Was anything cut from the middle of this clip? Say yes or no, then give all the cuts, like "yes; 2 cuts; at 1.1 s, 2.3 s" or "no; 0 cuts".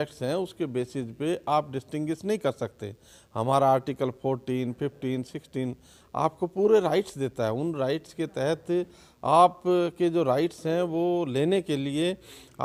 no; 0 cuts